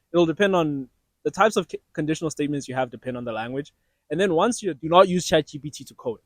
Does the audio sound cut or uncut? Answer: cut